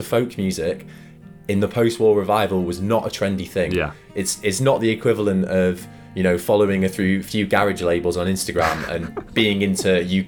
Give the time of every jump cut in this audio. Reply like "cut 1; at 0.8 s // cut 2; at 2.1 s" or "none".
none